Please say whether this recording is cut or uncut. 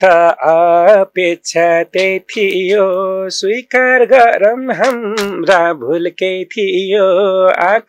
uncut